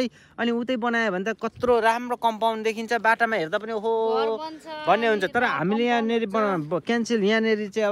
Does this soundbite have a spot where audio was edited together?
no; 0 cuts

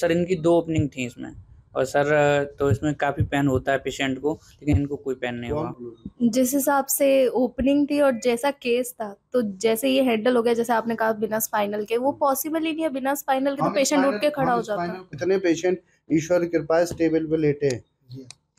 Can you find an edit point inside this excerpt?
yes; 2 cuts; at 5.8 s, 15.2 s

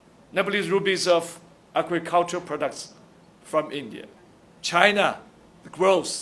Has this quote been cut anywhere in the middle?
yes; 1 cut; at 4.5 s

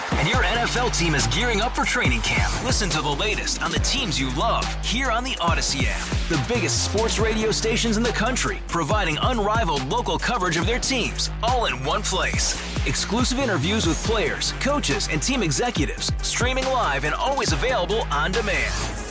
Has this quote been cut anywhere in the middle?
no; 0 cuts

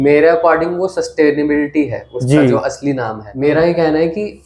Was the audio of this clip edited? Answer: yes; 1 cut; at 3.2 s

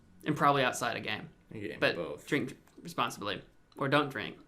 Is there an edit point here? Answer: yes; 1 cut; at 3.6 s

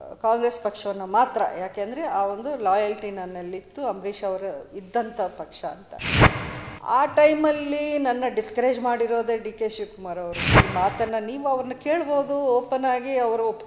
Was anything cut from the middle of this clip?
yes; 1 cut; at 10.5 s

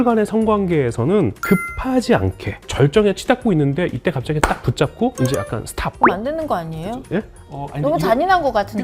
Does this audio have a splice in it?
yes; 1 cut; at 1.4 s

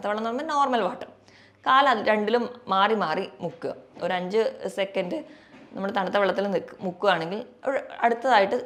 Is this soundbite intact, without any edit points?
yes; 0 cuts

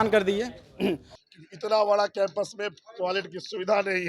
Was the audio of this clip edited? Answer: yes; 1 cut; at 1.1 s

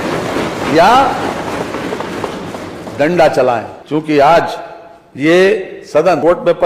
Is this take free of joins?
yes; 0 cuts

